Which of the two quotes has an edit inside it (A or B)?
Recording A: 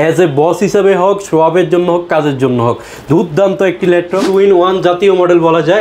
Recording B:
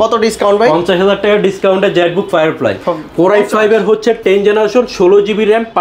A